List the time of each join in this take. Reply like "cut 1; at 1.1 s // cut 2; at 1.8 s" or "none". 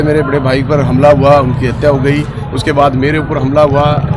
none